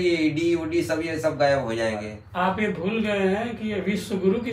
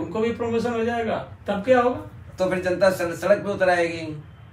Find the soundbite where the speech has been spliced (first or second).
first